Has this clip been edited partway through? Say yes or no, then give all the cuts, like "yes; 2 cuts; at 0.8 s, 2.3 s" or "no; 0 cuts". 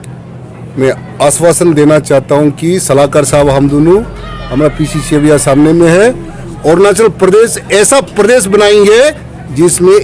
no; 0 cuts